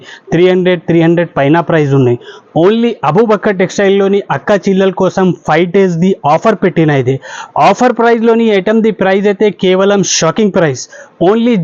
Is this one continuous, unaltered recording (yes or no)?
yes